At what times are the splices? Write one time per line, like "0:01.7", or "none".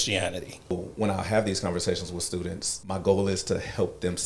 0:00.7
0:02.7